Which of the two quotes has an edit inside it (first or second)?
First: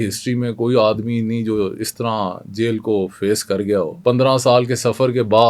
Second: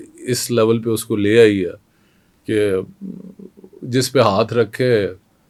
first